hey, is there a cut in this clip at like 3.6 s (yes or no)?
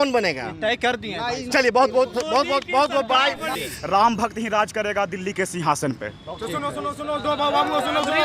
yes